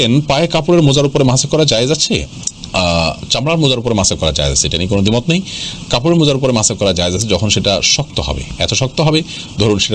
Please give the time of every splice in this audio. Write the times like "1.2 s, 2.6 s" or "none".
none